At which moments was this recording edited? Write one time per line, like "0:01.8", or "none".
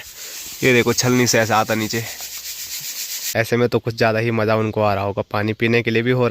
0:03.2